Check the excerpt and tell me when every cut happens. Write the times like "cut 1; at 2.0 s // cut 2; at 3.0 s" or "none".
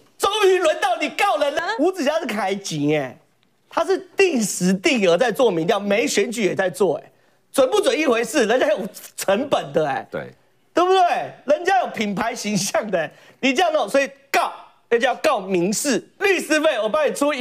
cut 1; at 1.6 s // cut 2; at 16.1 s

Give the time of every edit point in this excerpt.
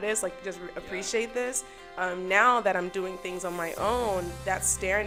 none

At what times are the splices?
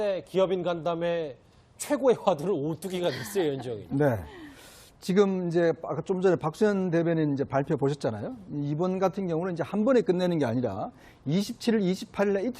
cut 1; at 8.2 s

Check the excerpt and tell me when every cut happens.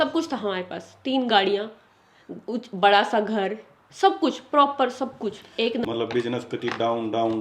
cut 1; at 5.8 s

